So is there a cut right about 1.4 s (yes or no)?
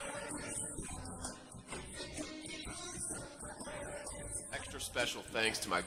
no